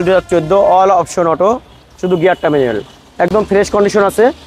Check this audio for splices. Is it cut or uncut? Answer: uncut